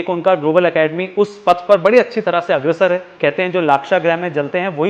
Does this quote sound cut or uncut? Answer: cut